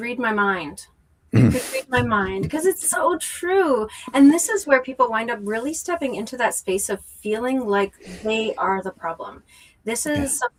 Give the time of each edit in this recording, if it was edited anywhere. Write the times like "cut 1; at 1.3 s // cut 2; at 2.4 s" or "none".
none